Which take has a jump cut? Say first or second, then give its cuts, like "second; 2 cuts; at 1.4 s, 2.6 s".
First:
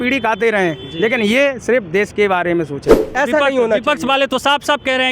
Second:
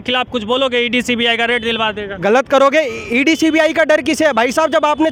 first; 1 cut; at 3.0 s